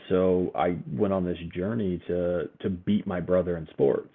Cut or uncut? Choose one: uncut